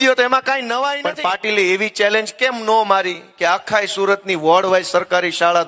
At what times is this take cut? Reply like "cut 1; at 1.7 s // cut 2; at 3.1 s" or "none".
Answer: cut 1; at 1.0 s